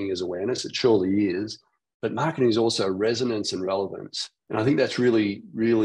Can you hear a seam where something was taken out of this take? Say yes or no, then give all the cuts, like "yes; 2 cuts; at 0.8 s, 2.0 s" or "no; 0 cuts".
yes; 1 cut; at 4.3 s